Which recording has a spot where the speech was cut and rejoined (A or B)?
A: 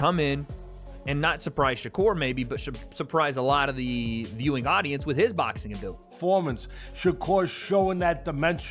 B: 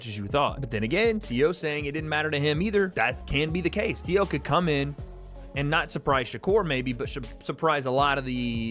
A